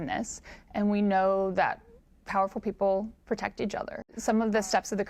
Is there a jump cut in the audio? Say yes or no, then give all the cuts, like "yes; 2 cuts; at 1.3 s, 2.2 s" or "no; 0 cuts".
yes; 1 cut; at 4.2 s